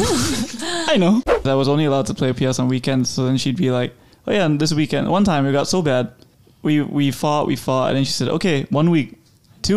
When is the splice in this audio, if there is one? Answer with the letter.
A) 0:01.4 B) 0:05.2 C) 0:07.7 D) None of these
A